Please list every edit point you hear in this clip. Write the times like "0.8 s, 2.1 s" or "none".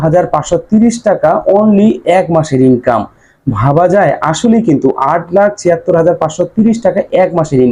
none